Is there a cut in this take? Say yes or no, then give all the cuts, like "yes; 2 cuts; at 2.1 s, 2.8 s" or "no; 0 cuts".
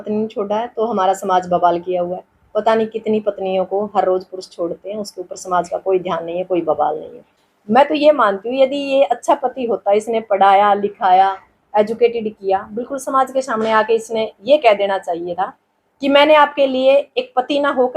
yes; 1 cut; at 7.4 s